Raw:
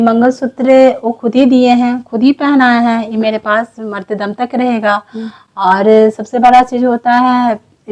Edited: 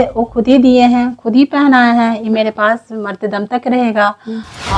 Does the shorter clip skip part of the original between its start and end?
no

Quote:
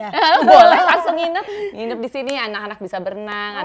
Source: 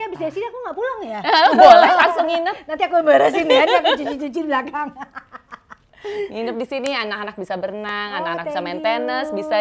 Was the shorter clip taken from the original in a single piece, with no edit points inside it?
no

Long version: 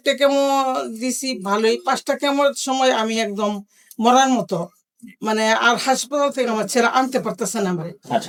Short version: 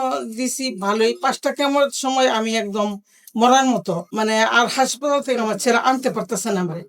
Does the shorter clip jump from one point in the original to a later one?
yes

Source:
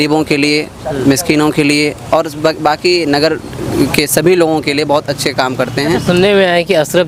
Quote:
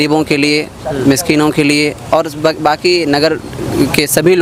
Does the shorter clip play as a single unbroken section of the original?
yes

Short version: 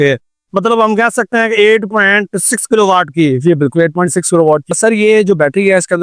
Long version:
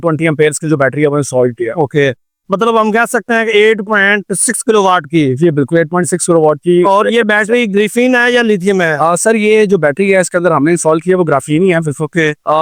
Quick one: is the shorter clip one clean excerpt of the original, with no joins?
no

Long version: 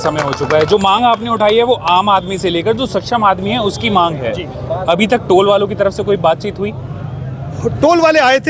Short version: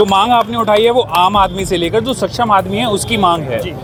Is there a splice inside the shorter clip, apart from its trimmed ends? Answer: no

